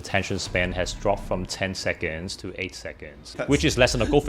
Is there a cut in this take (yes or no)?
yes